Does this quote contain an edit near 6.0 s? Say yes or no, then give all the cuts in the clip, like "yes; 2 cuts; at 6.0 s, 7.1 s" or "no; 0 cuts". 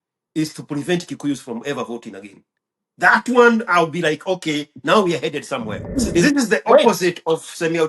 yes; 1 cut; at 6.0 s